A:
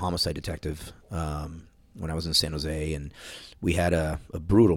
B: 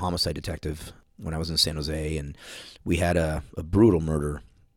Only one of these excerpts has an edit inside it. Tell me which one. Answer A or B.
B